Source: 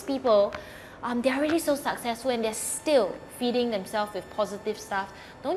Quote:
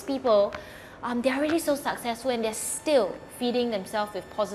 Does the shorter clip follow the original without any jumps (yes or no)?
yes